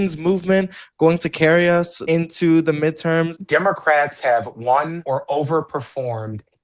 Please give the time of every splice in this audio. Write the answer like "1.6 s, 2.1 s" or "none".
2.0 s, 3.4 s, 5.0 s